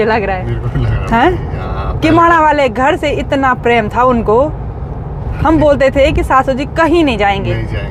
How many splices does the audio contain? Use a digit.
0